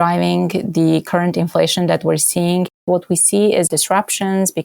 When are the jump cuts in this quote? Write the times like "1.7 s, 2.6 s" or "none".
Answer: 1.1 s, 2.8 s, 3.7 s